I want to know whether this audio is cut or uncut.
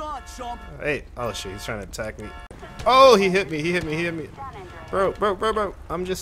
cut